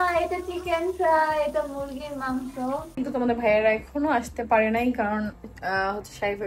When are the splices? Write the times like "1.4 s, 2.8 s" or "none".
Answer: 2.9 s